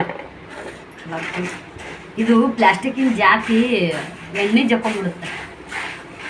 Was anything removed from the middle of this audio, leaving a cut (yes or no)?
no